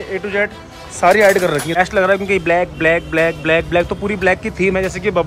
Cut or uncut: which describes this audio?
cut